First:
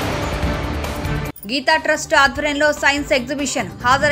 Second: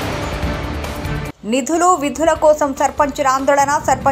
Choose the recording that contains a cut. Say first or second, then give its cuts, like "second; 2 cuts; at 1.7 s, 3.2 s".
second; 1 cut; at 1.1 s